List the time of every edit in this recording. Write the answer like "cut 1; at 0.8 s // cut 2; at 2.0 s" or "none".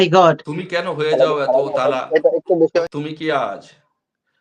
cut 1; at 2.8 s